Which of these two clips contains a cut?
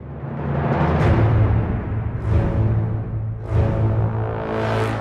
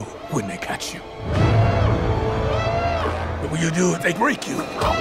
first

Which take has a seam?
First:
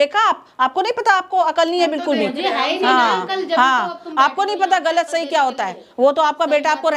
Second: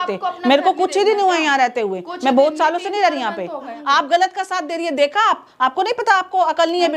second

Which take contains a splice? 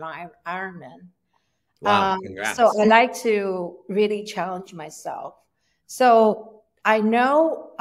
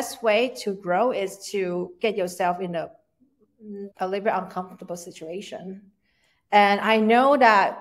second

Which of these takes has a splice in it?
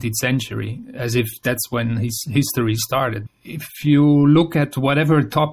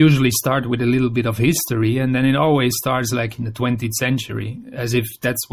first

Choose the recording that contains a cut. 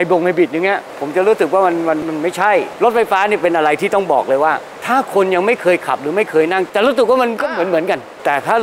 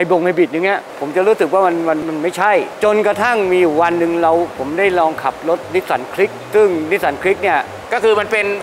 first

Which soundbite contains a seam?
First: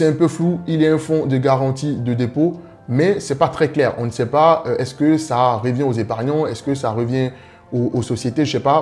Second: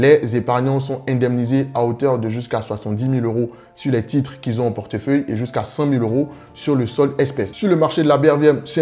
second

